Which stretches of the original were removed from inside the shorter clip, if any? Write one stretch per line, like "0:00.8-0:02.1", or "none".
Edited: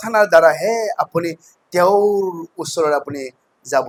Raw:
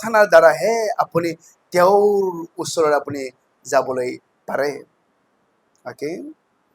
none